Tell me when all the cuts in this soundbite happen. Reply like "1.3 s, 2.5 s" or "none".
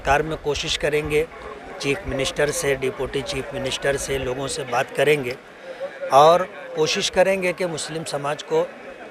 none